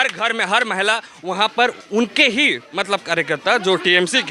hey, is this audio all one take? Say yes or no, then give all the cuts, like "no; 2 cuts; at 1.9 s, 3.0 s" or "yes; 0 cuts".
yes; 0 cuts